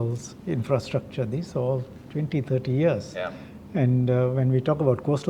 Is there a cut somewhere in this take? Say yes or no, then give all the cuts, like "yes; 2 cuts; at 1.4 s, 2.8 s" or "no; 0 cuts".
no; 0 cuts